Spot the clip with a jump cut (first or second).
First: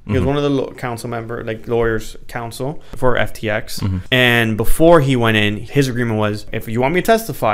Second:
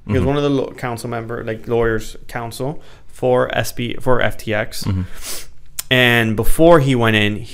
first